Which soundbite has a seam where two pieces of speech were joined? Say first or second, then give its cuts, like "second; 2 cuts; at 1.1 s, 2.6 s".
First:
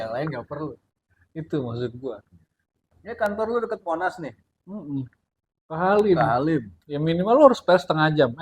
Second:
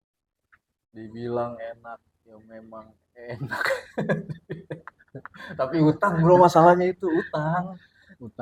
first; 1 cut; at 3.0 s